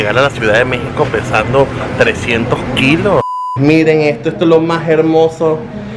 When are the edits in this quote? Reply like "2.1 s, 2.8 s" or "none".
3.3 s